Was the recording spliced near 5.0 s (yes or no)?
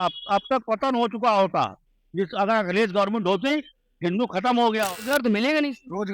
yes